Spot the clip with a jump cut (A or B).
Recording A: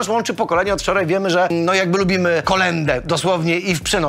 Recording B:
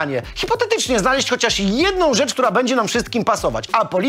A